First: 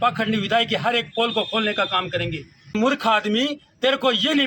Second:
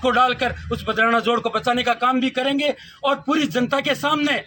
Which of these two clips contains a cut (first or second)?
first